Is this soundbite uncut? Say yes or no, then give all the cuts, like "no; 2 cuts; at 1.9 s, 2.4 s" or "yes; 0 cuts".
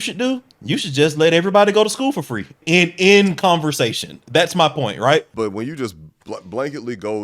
no; 2 cuts; at 2.6 s, 5.3 s